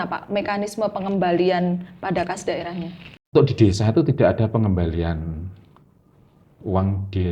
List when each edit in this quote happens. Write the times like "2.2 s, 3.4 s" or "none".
3.3 s